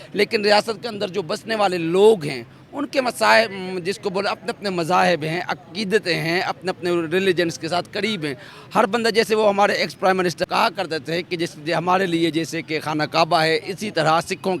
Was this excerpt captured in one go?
no; 1 cut; at 10.5 s

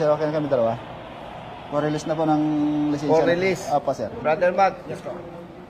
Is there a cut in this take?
yes; 1 cut; at 4.1 s

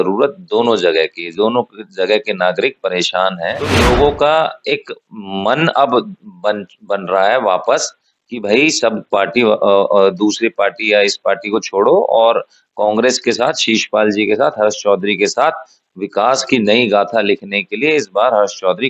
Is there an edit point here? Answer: yes; 1 cut; at 3.9 s

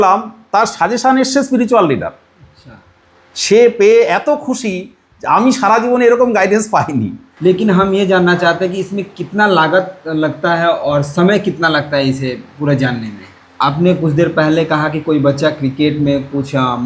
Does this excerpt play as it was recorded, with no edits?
no; 2 cuts; at 7.2 s, 13.4 s

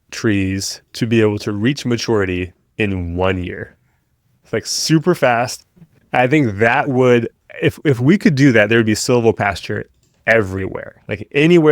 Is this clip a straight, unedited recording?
yes; 0 cuts

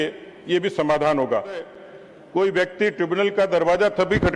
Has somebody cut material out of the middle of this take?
yes; 1 cut; at 1.8 s

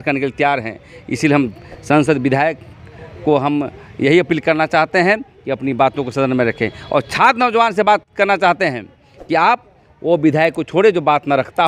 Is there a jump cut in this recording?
no; 0 cuts

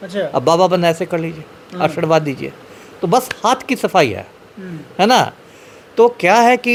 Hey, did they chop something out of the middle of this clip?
no; 0 cuts

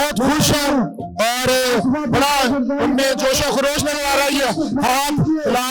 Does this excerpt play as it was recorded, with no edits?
yes; 0 cuts

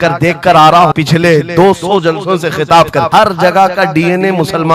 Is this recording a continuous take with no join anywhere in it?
no; 2 cuts; at 0.9 s, 3.1 s

